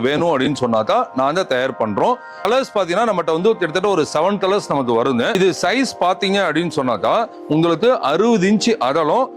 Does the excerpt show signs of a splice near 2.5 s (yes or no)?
yes